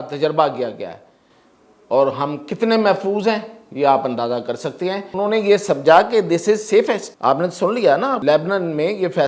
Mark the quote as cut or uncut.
cut